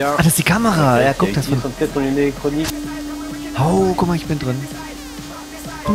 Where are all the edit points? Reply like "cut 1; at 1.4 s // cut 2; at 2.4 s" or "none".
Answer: cut 1; at 2.7 s